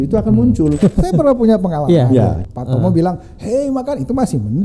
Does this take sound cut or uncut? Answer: cut